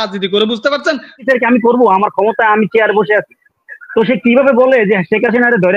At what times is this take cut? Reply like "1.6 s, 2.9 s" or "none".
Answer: 1.2 s